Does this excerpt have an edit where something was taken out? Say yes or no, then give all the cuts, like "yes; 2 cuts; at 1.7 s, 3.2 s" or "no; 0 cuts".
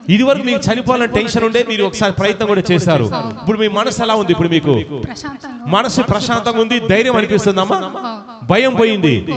no; 0 cuts